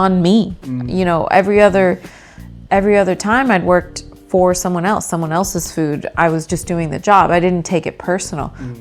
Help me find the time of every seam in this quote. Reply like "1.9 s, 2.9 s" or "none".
none